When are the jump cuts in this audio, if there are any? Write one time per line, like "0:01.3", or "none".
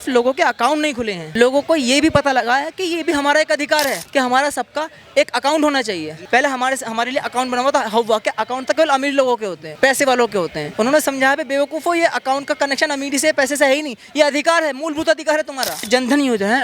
0:01.2
0:04.0
0:06.1
0:09.6
0:10.6
0:15.8